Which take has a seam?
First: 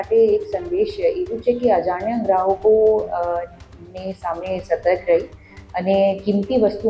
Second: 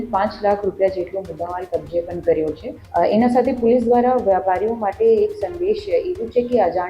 second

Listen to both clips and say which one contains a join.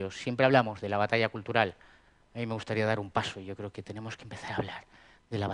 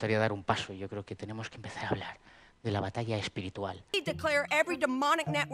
second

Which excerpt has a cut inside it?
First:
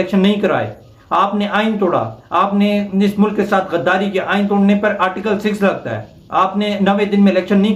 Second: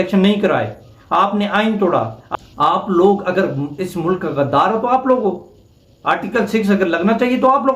second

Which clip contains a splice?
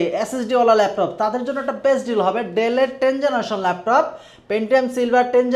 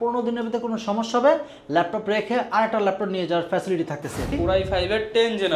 second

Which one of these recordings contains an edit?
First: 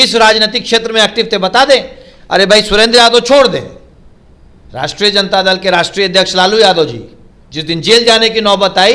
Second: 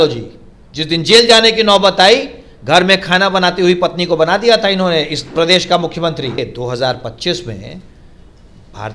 second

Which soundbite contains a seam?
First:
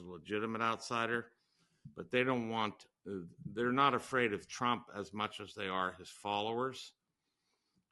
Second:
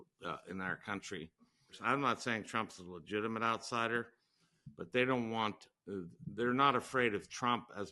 second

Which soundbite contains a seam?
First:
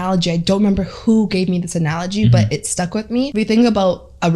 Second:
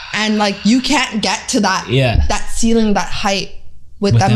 first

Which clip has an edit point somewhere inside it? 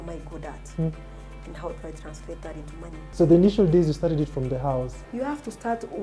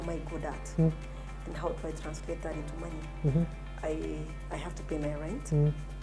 first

